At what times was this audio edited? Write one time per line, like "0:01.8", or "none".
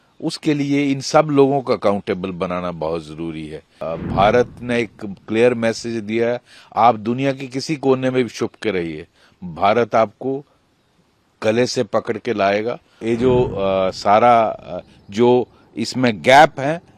0:03.9
0:13.0